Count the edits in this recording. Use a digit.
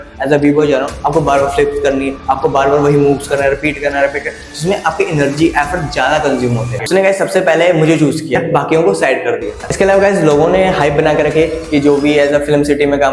2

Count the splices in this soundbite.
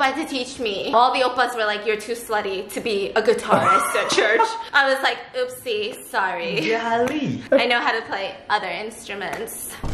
2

